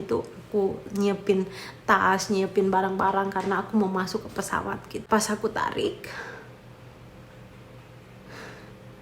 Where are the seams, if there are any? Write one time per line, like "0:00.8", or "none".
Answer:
0:05.1